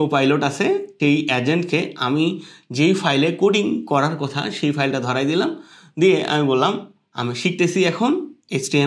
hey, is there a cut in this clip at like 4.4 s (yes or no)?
no